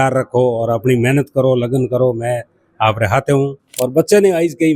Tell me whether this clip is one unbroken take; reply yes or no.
no